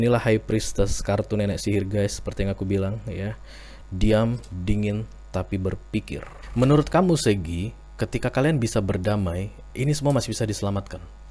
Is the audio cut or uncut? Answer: cut